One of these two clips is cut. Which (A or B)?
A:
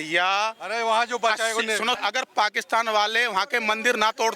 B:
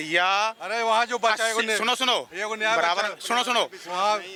A